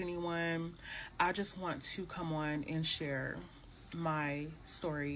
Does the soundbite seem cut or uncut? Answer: uncut